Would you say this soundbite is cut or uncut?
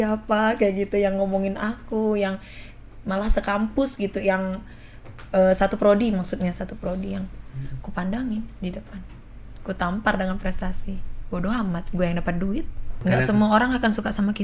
cut